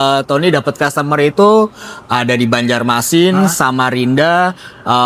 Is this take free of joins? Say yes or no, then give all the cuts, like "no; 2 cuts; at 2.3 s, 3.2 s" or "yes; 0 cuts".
yes; 0 cuts